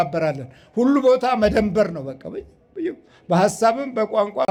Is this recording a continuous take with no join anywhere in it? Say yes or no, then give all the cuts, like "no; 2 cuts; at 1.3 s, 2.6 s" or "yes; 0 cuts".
yes; 0 cuts